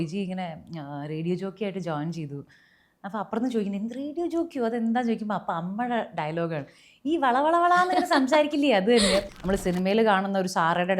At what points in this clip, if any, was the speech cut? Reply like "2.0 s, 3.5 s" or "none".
9.3 s